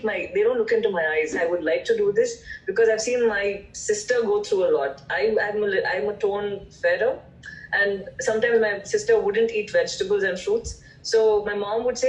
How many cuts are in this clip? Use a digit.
1